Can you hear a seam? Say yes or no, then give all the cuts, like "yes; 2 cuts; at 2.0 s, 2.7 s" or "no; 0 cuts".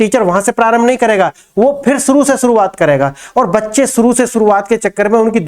no; 0 cuts